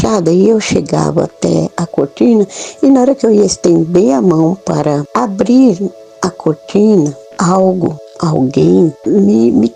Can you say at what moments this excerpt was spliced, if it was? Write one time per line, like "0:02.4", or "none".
0:05.1
0:07.2
0:08.1
0:09.0